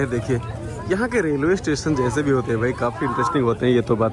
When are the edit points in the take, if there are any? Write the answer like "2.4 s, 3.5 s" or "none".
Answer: none